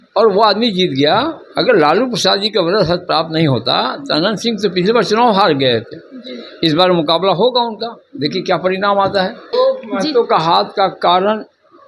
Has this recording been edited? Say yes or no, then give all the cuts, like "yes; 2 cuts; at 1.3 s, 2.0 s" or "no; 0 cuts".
yes; 1 cut; at 9.5 s